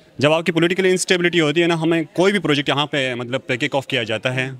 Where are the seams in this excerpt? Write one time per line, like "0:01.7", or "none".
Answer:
none